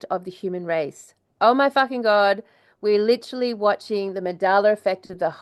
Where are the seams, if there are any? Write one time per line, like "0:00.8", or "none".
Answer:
none